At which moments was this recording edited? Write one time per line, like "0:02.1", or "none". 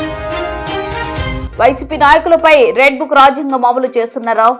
0:01.4